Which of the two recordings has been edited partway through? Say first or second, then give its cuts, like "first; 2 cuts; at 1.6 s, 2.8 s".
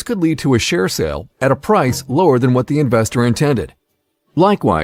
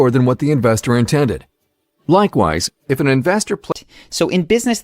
second; 1 cut; at 3.6 s